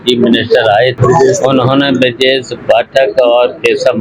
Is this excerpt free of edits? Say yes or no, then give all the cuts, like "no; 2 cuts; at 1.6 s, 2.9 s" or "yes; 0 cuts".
no; 1 cut; at 1.0 s